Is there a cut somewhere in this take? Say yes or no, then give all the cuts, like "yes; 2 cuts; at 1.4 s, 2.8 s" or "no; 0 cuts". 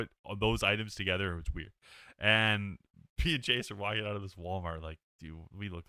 no; 0 cuts